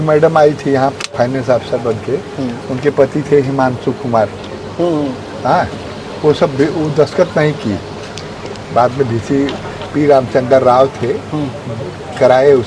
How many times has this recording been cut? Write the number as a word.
zero